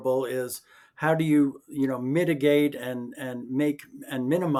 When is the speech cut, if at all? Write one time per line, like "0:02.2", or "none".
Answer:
none